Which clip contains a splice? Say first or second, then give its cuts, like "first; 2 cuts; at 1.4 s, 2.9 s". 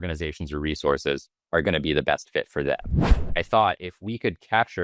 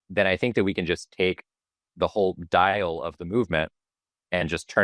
first; 2 cuts; at 1.3 s, 2.9 s